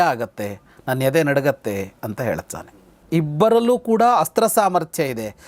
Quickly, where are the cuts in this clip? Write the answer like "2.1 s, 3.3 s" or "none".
2.9 s